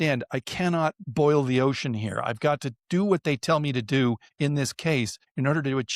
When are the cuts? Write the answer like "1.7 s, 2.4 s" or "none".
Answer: none